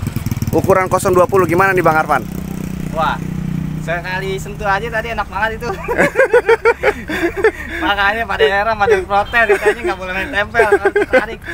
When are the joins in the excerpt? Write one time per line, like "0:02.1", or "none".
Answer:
none